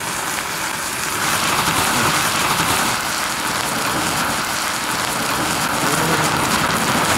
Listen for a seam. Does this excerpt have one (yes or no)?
yes